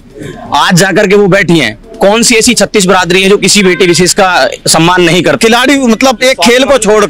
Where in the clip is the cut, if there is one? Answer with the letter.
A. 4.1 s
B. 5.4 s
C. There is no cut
B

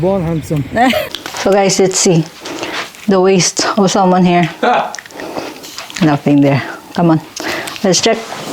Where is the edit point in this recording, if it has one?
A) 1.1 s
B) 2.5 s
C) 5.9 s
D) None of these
A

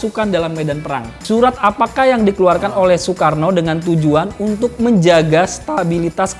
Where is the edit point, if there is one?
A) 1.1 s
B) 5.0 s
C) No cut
A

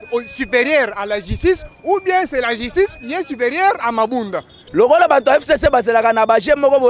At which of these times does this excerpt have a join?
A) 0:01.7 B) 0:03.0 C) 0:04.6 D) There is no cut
C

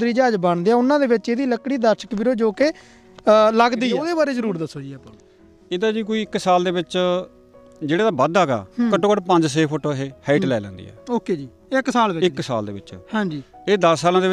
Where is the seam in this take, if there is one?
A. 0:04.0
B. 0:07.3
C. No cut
A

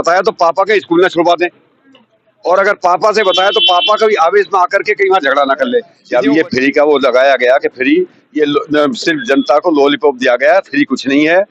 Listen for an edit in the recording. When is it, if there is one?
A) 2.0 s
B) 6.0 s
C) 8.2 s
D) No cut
B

